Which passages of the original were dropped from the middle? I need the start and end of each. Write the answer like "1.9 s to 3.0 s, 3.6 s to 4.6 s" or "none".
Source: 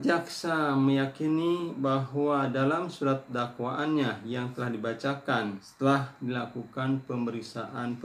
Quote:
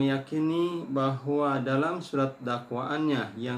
none